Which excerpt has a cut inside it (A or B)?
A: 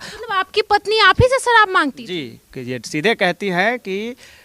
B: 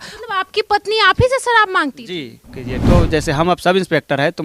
B